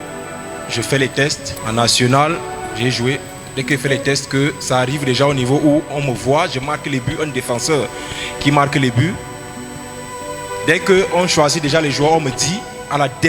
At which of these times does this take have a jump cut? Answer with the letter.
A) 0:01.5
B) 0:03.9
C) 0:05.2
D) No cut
A